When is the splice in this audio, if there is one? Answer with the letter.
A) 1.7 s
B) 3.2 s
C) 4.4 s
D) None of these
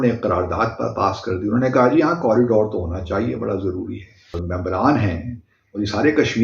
C